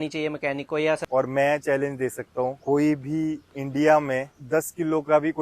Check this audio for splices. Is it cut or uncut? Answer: cut